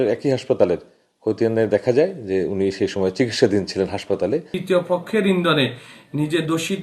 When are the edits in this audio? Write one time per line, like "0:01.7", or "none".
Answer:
0:04.5